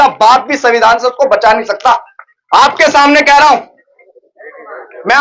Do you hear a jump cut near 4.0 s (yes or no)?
yes